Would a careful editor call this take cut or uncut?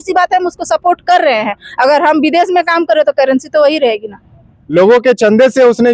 cut